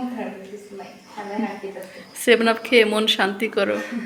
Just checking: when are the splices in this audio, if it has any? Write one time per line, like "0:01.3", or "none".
none